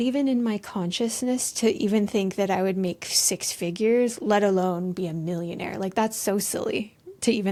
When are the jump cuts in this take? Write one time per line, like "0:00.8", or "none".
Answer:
none